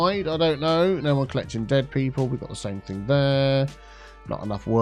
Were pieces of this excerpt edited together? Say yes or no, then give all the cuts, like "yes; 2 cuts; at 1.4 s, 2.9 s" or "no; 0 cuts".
no; 0 cuts